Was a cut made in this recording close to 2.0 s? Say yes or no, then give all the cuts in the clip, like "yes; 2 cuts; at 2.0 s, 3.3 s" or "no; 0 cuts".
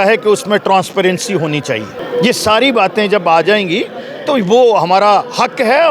yes; 1 cut; at 2.0 s